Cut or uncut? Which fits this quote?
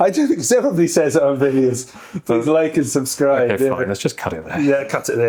uncut